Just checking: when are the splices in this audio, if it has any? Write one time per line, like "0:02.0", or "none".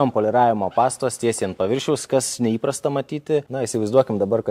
0:03.5